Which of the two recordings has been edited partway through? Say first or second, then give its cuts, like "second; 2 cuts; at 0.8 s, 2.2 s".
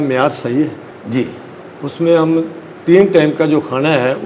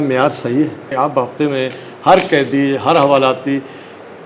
second; 1 cut; at 0.9 s